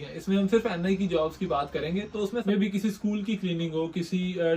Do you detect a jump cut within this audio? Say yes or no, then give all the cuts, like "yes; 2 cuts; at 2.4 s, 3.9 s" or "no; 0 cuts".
yes; 1 cut; at 2.4 s